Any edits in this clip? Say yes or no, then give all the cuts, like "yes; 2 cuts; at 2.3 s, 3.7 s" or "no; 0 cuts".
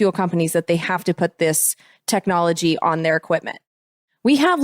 yes; 1 cut; at 3.7 s